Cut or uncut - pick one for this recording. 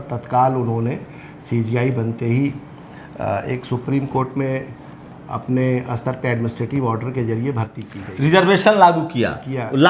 uncut